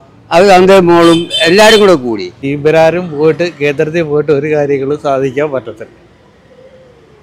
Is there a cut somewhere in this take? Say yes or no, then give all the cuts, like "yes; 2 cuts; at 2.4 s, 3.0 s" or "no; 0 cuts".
yes; 1 cut; at 2.5 s